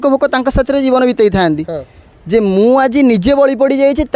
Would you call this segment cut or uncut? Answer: uncut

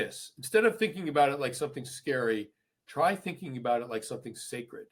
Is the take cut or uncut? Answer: uncut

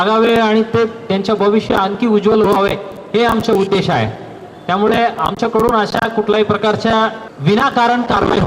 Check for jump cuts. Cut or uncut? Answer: cut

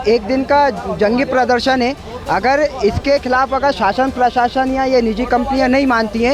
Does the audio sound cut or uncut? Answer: uncut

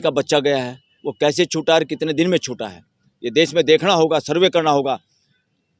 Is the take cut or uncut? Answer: uncut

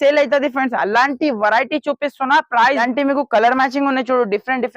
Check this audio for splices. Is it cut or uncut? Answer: cut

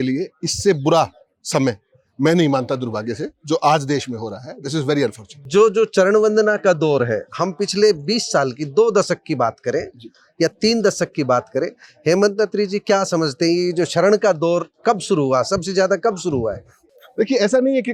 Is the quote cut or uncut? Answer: uncut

